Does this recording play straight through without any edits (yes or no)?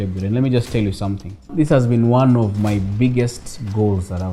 no